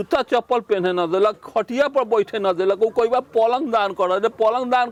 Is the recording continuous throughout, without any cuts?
yes; 0 cuts

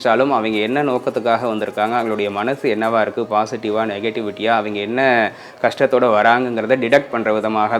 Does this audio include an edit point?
no; 0 cuts

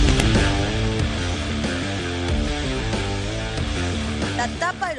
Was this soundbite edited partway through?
no; 0 cuts

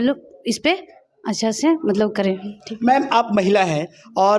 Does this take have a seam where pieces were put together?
no; 0 cuts

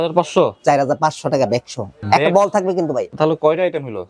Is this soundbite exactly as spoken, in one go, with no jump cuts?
no; 2 cuts; at 2.0 s, 3.1 s

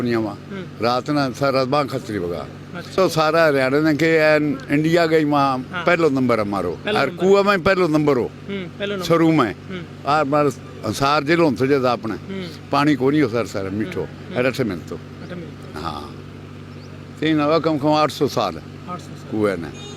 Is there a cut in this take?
yes; 1 cut; at 2.9 s

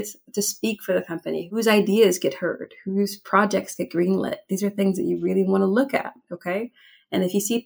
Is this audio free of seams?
yes; 0 cuts

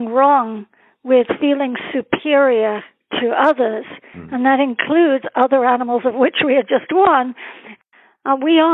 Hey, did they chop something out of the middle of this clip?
yes; 1 cut; at 7.7 s

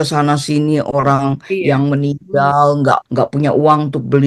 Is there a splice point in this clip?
yes; 1 cut; at 3.1 s

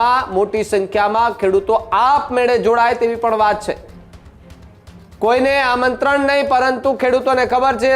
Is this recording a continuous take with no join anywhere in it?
yes; 0 cuts

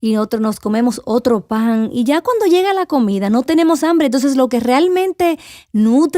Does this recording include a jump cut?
yes; 1 cut; at 3.4 s

